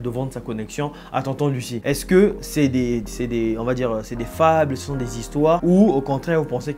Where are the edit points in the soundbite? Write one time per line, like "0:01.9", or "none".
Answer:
0:01.7
0:05.6